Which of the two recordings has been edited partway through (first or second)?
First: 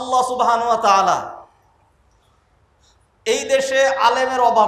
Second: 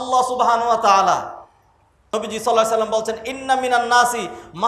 second